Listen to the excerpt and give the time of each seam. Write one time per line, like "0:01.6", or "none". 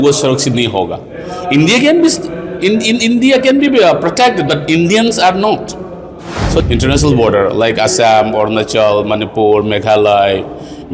0:06.6

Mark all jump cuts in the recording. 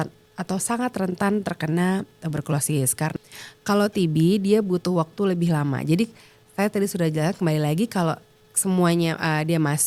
0:03.1

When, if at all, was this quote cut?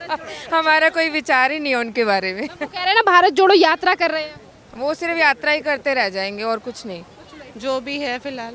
0:07.4

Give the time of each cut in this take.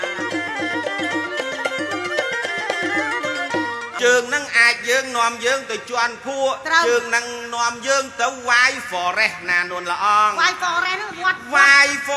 0:03.9

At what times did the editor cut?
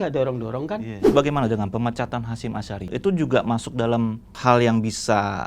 0:01.1
0:04.3

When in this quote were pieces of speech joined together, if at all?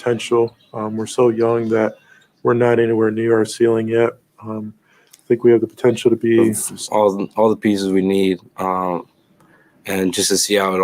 0:06.7

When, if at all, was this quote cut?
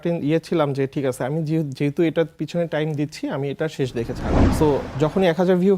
0:04.4

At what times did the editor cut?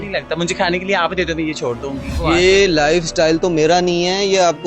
0:02.2

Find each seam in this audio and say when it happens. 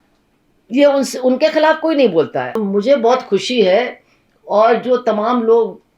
0:02.6

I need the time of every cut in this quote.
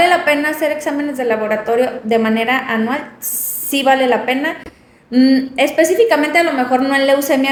none

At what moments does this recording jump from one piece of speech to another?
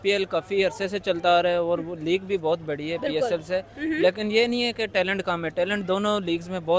none

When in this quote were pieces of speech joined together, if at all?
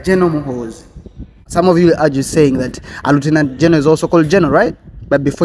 0:01.4

